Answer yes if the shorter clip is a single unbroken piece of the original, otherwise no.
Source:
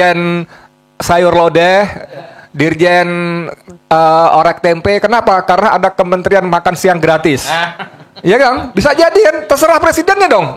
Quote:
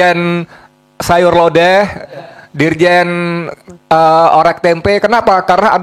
yes